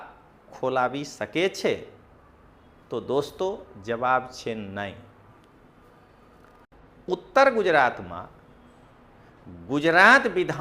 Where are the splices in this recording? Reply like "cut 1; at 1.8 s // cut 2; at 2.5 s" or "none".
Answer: cut 1; at 6.7 s